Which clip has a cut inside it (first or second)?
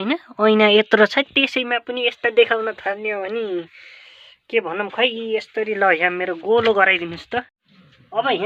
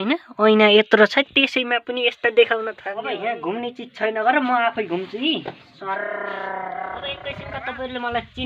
second